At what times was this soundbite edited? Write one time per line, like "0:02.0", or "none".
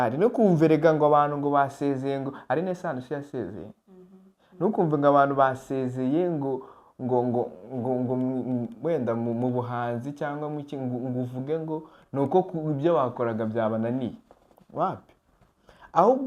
none